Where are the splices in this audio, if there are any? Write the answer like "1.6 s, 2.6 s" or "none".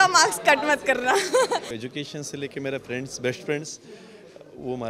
1.8 s